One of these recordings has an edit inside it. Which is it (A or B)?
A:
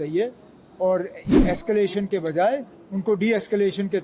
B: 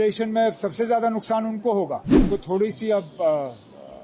B